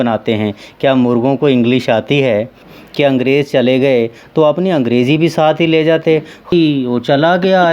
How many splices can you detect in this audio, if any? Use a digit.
2